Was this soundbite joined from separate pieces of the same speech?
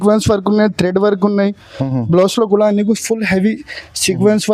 no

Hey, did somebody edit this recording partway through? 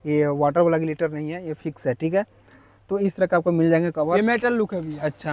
yes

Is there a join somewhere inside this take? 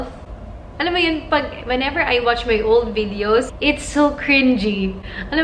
yes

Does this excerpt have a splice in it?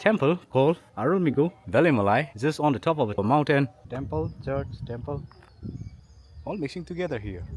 yes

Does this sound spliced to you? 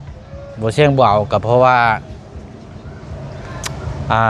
no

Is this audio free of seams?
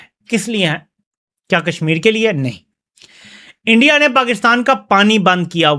yes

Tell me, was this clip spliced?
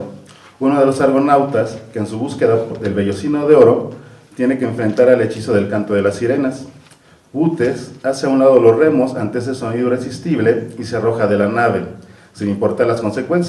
no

